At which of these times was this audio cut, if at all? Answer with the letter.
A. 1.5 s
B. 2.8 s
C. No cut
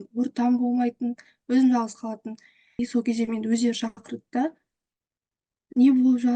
B